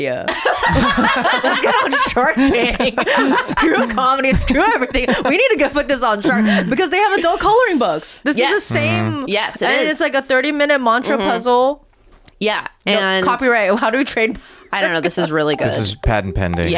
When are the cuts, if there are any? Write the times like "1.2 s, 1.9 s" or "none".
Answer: none